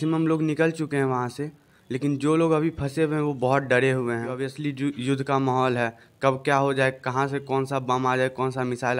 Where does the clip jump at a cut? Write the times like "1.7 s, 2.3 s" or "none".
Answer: 4.5 s